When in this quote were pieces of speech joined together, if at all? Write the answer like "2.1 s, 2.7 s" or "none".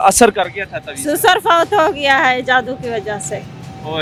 none